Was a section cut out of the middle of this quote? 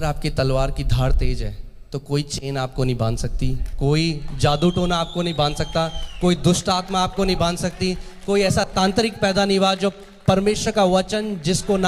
no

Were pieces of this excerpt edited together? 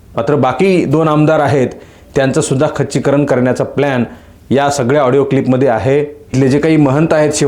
yes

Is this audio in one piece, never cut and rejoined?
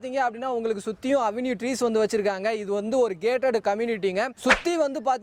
yes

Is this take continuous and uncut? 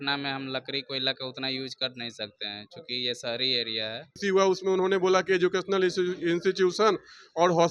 no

